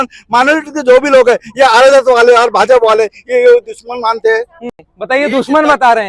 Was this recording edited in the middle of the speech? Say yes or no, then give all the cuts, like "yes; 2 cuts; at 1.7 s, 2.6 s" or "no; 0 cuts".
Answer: no; 0 cuts